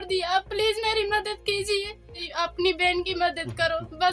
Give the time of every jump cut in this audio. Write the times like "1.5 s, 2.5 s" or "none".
2.3 s

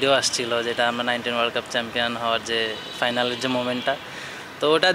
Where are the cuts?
none

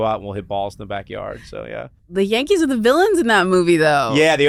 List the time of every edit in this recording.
none

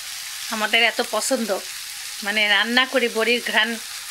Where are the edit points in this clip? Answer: none

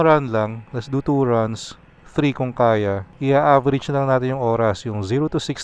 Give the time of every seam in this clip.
3.1 s

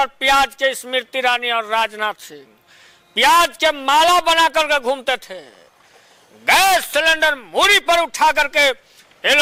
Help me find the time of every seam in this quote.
none

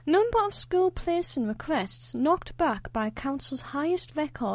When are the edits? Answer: none

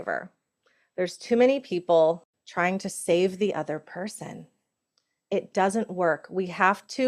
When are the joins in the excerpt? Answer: 2.3 s

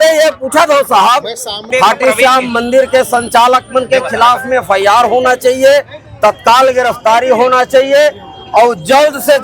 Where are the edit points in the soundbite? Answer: 1.7 s

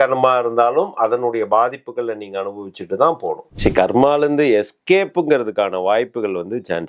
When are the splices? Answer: 3.5 s

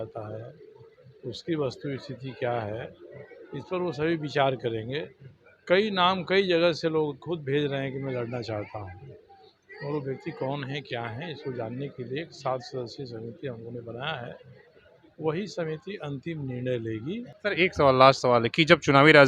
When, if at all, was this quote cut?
17.3 s

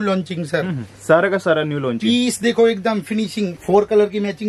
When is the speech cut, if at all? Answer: 3.6 s

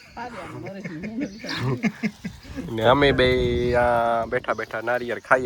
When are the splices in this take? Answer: none

